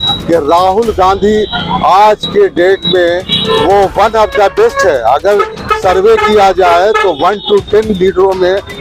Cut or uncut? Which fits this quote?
uncut